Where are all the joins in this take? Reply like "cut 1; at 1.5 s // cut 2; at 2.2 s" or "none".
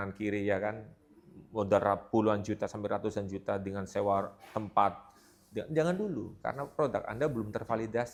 none